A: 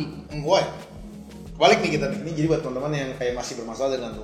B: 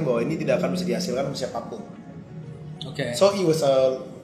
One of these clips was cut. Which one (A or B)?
A